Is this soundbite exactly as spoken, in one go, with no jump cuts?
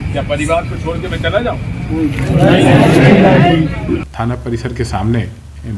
no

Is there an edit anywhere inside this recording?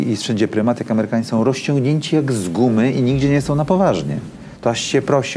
no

